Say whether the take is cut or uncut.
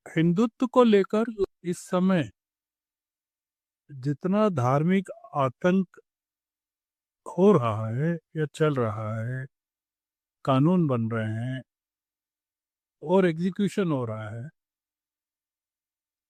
uncut